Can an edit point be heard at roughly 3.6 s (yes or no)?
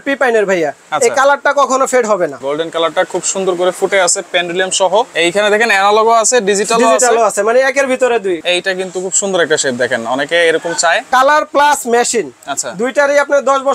no